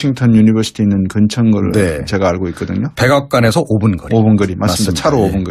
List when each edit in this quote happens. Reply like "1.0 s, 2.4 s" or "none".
4.6 s